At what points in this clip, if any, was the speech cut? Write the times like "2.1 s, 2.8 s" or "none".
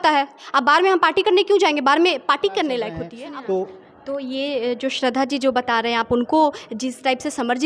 3.1 s